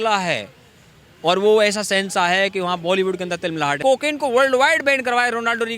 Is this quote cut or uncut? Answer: cut